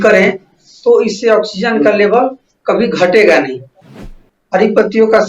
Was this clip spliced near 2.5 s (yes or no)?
no